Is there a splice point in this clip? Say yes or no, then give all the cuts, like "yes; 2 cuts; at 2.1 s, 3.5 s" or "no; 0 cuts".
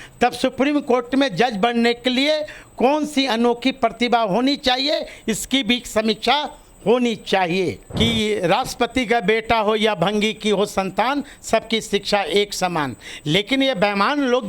yes; 1 cut; at 7.8 s